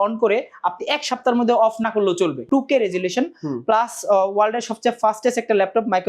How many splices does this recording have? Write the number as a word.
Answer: one